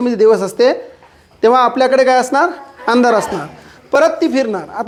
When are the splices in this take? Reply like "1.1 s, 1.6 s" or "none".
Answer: none